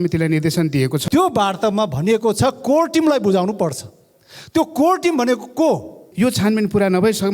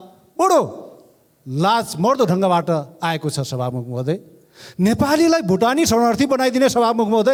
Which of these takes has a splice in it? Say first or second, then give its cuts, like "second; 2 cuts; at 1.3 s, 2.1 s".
first; 2 cuts; at 1.0 s, 6.0 s